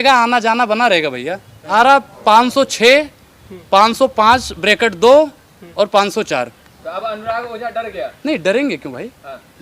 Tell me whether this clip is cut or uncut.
cut